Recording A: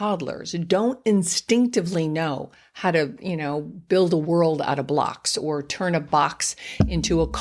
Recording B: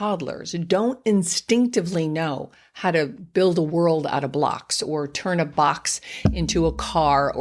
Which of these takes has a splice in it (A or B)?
B